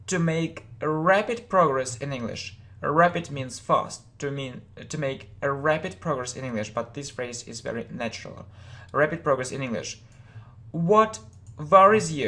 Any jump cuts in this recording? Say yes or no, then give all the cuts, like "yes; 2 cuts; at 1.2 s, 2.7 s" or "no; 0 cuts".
yes; 1 cut; at 2.1 s